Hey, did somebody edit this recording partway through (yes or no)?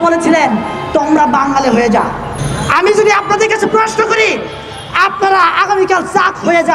yes